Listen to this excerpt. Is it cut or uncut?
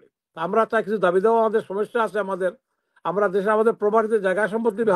uncut